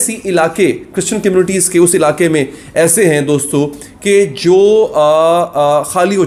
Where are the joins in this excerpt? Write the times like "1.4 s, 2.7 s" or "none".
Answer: none